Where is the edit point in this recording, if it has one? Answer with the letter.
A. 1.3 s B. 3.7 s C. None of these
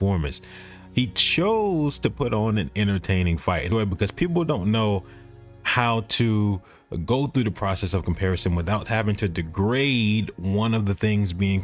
B